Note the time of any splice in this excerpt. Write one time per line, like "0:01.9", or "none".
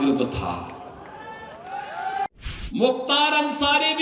0:02.3